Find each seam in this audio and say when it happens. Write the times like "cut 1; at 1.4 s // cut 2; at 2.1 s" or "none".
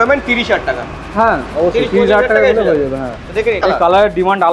cut 1; at 3.6 s